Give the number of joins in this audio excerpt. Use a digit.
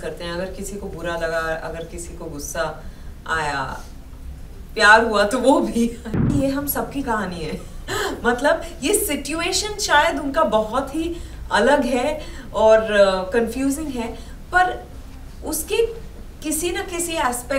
1